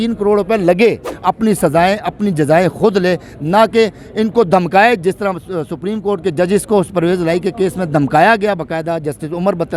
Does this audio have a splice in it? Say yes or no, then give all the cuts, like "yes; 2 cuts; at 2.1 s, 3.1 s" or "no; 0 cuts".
yes; 1 cut; at 1.1 s